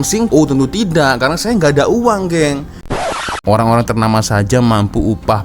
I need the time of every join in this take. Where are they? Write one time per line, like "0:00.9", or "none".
0:03.0